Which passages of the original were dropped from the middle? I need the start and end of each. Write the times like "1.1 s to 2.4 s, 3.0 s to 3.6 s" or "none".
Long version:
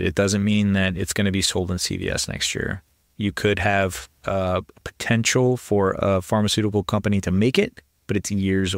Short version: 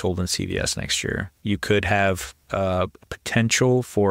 2.8 s to 3.1 s